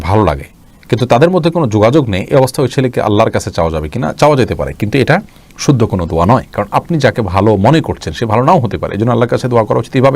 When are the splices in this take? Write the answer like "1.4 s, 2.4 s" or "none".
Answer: none